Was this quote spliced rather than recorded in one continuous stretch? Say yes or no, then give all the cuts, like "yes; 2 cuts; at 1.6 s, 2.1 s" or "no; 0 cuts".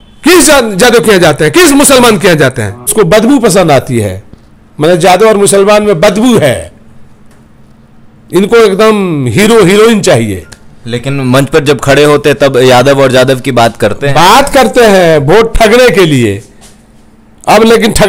yes; 1 cut; at 2.9 s